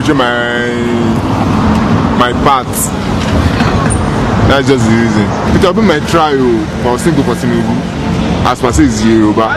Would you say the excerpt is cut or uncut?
uncut